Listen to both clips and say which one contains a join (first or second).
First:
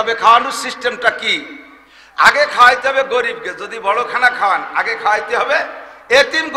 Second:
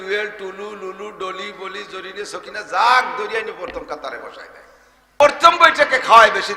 second